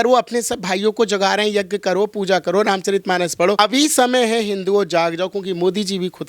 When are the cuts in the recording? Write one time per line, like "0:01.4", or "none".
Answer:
0:03.6